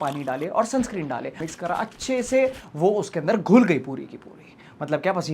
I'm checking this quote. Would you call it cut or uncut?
cut